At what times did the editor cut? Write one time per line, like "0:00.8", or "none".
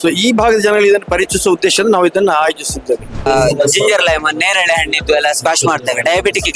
0:03.2